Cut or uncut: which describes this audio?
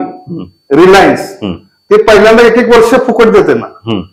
uncut